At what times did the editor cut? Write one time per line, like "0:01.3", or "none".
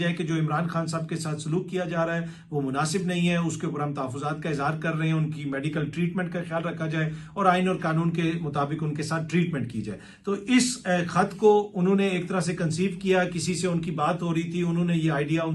none